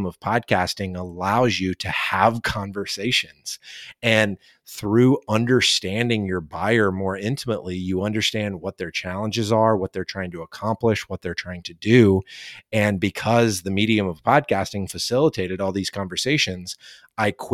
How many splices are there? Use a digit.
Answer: 0